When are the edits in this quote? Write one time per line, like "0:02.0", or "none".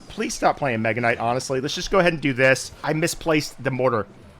0:02.8